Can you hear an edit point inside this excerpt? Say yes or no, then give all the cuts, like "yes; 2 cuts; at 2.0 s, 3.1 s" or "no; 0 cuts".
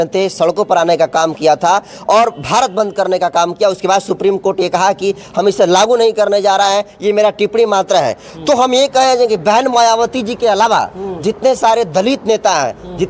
no; 0 cuts